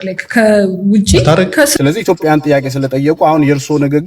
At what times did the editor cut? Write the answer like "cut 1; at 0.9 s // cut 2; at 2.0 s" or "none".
cut 1; at 1.7 s